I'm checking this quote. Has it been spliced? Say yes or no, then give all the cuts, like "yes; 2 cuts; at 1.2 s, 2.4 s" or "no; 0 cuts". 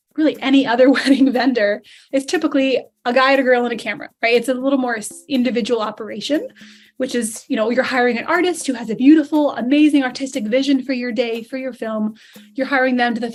no; 0 cuts